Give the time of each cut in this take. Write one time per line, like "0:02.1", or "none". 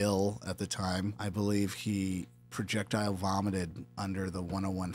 0:01.2